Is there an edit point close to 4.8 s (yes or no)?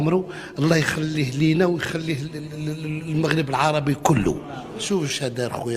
yes